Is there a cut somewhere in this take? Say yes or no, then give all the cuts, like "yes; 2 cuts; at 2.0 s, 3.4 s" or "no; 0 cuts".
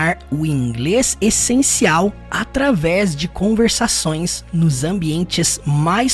no; 0 cuts